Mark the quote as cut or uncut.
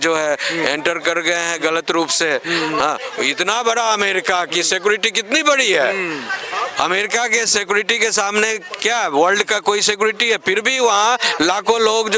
uncut